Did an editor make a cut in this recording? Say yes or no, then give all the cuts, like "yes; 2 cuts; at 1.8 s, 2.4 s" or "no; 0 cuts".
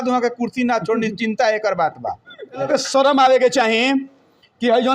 yes; 1 cut; at 2.7 s